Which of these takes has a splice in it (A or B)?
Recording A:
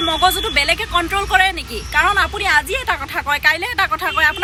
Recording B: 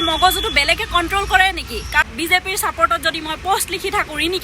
B